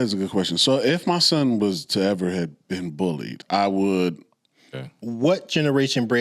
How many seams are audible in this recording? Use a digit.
2